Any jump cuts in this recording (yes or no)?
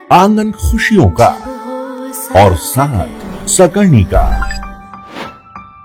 no